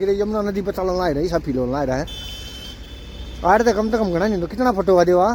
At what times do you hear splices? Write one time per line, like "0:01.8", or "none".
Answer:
none